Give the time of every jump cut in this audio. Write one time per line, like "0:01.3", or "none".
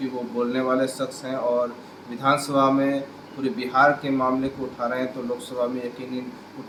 none

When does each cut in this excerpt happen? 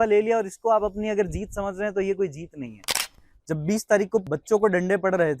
0:02.8
0:04.3

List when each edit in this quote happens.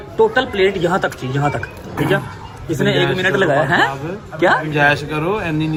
none

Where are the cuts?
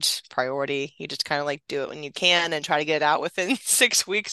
none

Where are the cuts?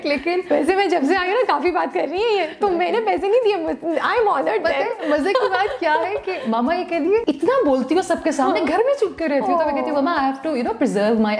0:07.2

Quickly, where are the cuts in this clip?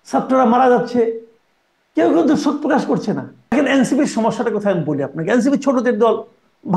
0:03.5

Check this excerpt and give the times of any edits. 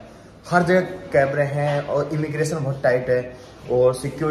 none

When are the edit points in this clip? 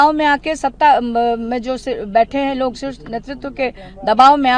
none

